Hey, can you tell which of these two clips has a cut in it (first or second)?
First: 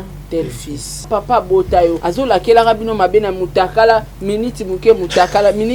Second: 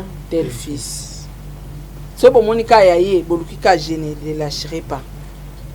first